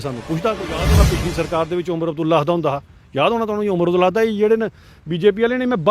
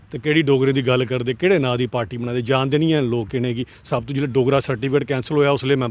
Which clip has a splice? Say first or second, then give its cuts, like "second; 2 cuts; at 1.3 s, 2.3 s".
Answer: first; 1 cut; at 0.9 s